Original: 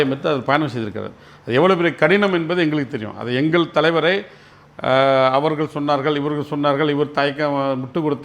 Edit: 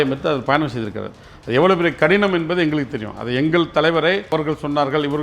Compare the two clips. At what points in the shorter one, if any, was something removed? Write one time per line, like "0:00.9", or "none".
0:04.3